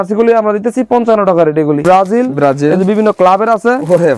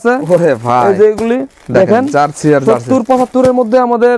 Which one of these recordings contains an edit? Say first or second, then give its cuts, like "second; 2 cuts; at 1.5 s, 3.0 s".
first; 1 cut; at 1.8 s